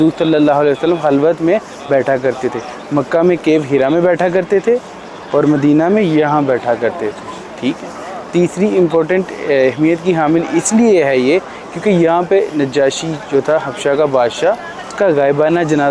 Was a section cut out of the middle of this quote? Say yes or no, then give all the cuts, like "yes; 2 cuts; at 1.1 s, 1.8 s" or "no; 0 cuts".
no; 0 cuts